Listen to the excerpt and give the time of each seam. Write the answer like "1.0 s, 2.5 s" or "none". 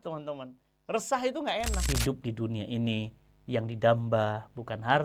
1.8 s